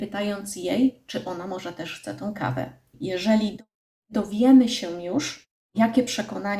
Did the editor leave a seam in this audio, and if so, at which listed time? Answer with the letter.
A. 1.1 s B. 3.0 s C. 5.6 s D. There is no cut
B